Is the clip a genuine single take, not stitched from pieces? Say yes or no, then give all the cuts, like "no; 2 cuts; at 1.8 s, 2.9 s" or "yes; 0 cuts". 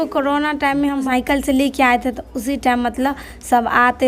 no; 1 cut; at 1.0 s